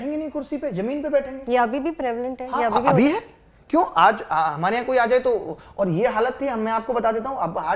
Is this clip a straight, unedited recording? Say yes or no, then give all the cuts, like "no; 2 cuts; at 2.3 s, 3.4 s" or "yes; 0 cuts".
yes; 0 cuts